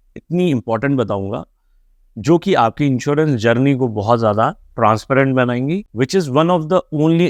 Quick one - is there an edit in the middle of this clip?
yes; 1 cut; at 5.9 s

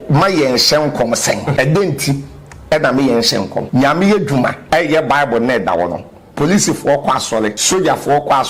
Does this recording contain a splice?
yes; 4 cuts; at 1.5 s, 3.6 s, 4.6 s, 7.6 s

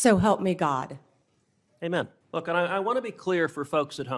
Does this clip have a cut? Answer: yes; 1 cut; at 2.2 s

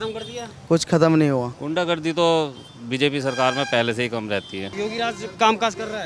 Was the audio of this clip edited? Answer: yes; 2 cuts; at 1.6 s, 4.7 s

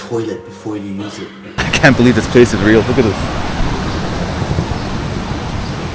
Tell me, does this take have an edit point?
yes; 1 cut; at 1.6 s

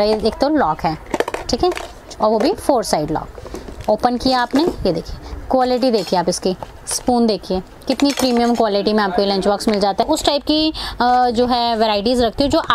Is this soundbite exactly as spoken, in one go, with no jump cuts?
no; 1 cut; at 10.0 s

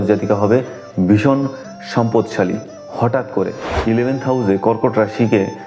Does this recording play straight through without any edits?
no; 1 cut; at 3.7 s

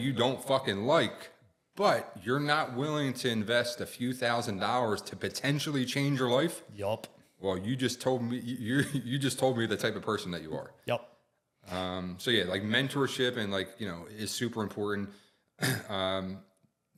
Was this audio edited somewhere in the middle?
no; 0 cuts

